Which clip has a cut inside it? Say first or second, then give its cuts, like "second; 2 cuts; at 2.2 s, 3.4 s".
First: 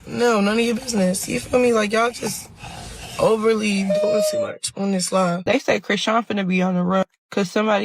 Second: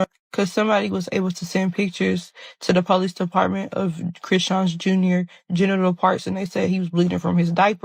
first; 1 cut; at 5.5 s